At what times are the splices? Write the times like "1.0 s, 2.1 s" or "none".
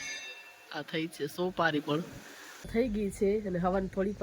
2.7 s